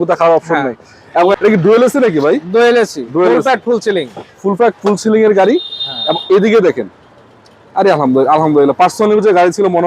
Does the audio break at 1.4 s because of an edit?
yes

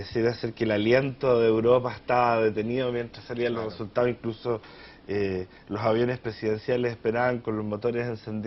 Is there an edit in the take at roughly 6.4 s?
no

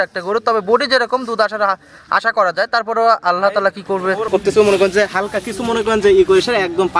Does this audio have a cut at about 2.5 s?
no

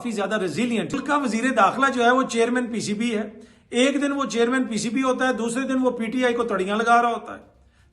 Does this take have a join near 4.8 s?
no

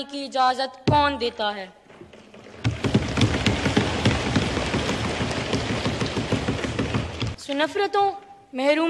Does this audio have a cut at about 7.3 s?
yes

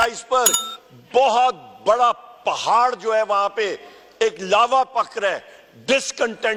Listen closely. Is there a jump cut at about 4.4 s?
no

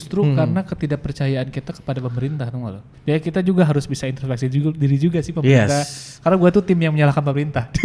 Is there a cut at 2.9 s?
yes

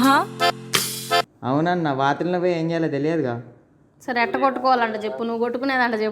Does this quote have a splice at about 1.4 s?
yes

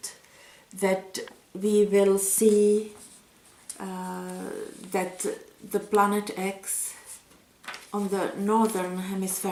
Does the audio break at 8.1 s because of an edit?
no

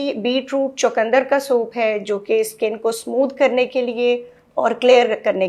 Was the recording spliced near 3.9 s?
no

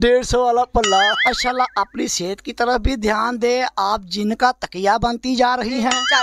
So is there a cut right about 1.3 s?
yes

